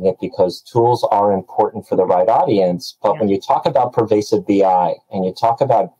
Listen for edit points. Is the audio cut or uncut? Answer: uncut